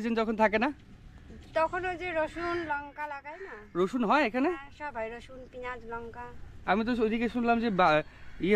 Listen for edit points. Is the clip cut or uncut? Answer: uncut